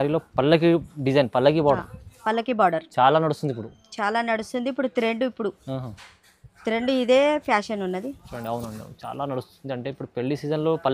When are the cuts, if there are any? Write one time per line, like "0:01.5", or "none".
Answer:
none